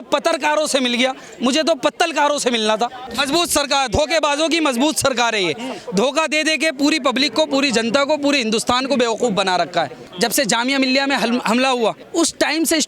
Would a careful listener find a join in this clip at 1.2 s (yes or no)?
no